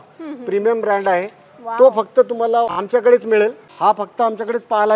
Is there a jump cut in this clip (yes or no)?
yes